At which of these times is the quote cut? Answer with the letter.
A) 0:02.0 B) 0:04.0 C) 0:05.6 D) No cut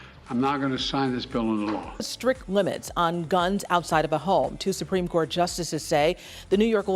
A